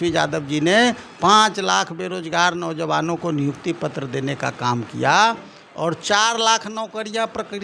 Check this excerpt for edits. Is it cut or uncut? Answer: uncut